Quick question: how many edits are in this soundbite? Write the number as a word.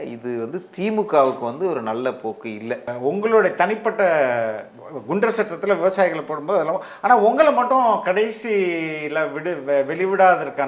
one